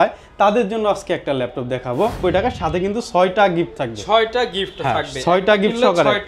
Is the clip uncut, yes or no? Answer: no